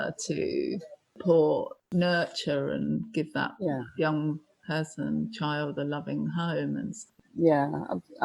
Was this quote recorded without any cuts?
no; 2 cuts; at 1.2 s, 7.1 s

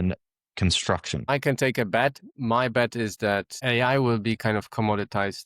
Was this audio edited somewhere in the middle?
yes; 3 cuts; at 1.3 s, 2.3 s, 3.6 s

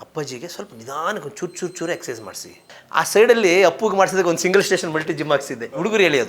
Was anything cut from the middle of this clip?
yes; 1 cut; at 2.8 s

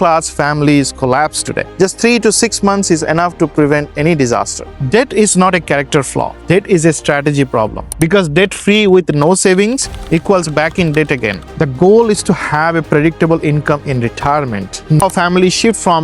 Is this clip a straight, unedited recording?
no; 5 cuts; at 1.7 s, 4.6 s, 7.8 s, 11.5 s, 15.0 s

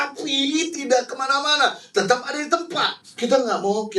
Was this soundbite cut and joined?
yes; 1 cut; at 3.0 s

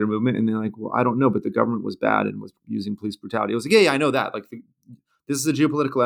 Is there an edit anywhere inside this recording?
yes; 1 cut; at 2.5 s

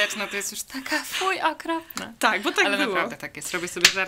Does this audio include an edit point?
no; 0 cuts

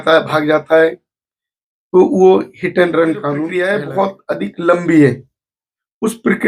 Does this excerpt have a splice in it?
yes; 1 cut; at 3.4 s

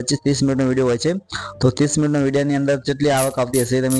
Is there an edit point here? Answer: no; 0 cuts

